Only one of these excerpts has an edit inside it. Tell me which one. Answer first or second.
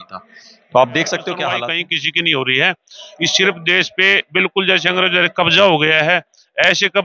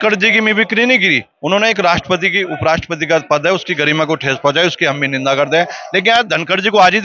first